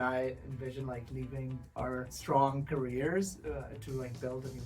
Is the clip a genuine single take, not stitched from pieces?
no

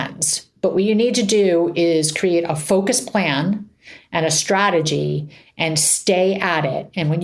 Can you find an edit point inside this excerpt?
no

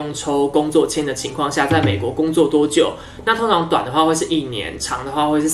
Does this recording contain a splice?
no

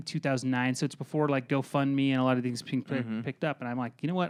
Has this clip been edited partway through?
no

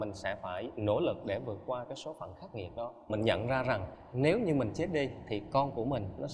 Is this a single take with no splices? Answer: yes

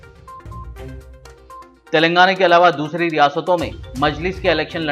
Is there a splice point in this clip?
no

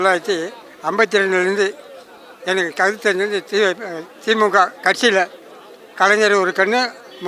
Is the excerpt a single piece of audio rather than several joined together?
yes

